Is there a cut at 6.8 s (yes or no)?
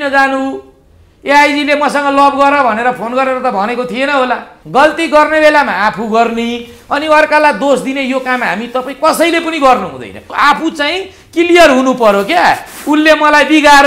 no